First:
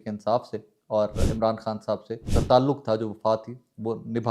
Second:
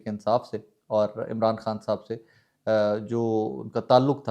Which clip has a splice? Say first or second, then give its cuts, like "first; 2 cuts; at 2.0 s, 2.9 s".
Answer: first; 1 cut; at 2.3 s